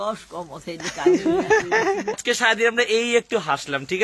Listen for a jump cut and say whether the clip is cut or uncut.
cut